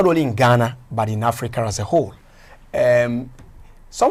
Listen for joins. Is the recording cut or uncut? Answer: uncut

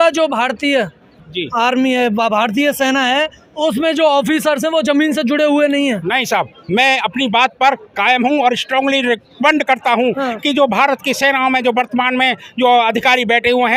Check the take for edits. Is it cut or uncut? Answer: uncut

